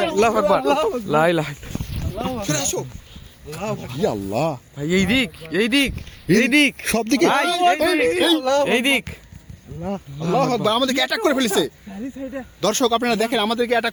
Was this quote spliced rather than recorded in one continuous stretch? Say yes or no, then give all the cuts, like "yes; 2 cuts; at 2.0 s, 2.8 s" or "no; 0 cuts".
no; 0 cuts